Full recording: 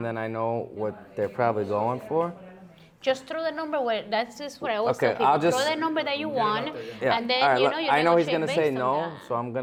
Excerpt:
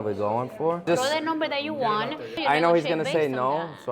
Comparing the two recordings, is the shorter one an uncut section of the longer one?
no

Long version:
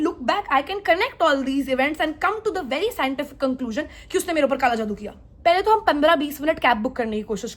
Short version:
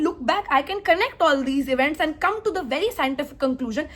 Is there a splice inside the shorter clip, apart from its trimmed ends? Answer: no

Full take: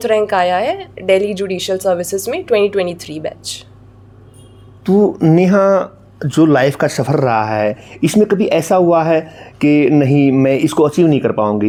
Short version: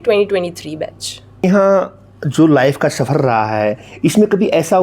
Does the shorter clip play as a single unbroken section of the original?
no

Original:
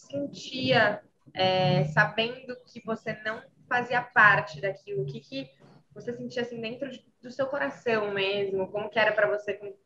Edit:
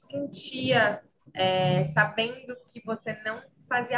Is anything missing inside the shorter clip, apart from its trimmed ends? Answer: no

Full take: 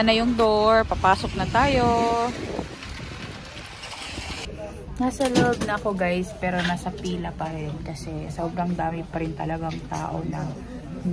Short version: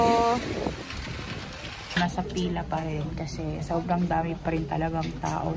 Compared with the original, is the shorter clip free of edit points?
no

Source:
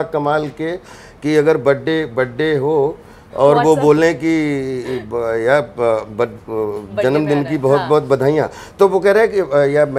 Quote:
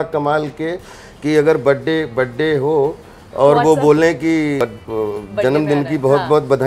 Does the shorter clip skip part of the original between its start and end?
yes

